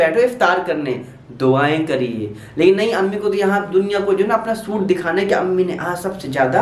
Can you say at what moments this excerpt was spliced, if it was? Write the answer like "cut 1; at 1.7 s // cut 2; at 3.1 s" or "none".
none